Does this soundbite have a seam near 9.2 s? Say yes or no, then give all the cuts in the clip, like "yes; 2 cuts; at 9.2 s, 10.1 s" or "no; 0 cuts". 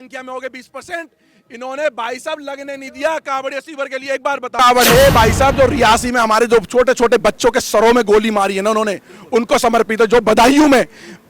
no; 1 cut; at 4.6 s